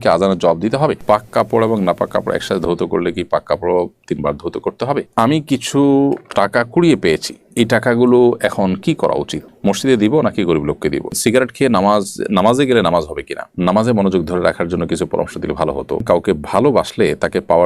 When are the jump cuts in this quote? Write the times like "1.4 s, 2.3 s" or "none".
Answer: 1.0 s, 5.1 s, 11.1 s, 13.5 s, 16.0 s

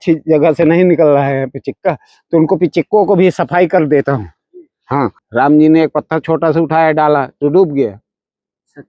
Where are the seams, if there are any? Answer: 5.2 s

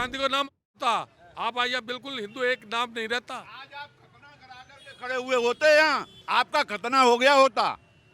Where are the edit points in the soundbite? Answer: 6.1 s

